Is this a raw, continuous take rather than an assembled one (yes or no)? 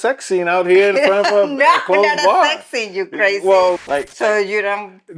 no